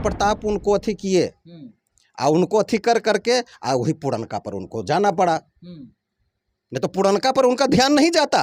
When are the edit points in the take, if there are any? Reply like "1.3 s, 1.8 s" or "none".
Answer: none